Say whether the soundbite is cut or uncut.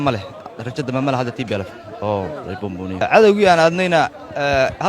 cut